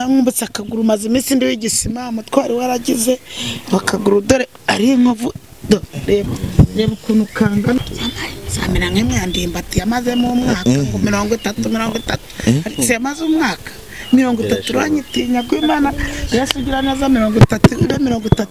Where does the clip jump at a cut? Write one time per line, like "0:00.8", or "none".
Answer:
0:07.8